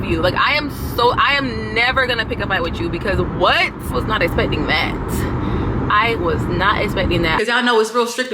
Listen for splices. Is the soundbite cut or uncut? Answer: cut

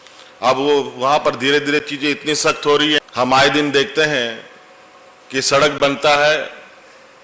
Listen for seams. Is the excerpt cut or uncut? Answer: cut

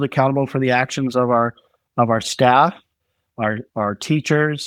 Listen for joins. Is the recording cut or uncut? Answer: uncut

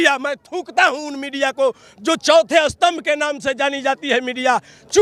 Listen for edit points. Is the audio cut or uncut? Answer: uncut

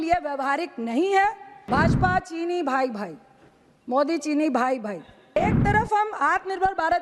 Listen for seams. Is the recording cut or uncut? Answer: cut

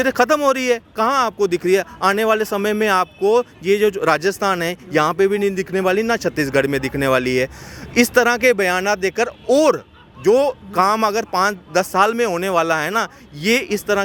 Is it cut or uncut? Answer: uncut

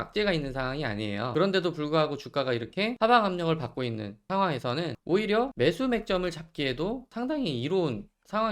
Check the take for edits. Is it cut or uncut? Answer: cut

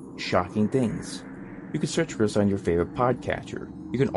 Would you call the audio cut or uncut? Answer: uncut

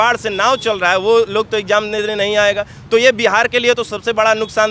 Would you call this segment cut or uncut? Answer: uncut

